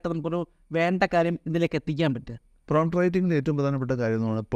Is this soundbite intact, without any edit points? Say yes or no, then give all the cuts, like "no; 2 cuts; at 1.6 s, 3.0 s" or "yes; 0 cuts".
yes; 0 cuts